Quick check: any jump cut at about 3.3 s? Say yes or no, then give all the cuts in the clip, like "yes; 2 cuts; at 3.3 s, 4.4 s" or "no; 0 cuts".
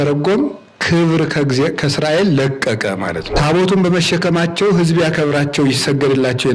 yes; 1 cut; at 3.3 s